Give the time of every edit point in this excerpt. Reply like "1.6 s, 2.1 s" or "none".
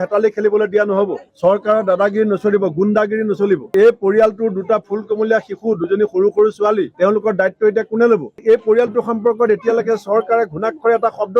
3.7 s, 8.4 s